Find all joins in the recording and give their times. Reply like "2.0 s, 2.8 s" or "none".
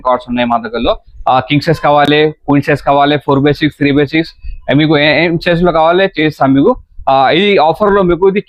none